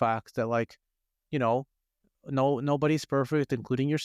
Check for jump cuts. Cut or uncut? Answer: uncut